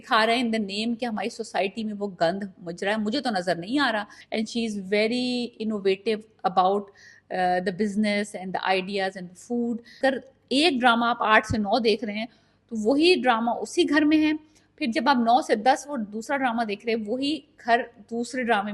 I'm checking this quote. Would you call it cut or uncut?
cut